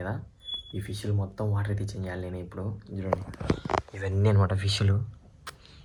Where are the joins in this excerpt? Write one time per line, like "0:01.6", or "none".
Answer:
none